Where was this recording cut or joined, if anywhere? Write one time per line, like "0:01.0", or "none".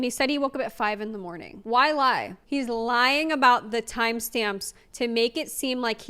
0:02.3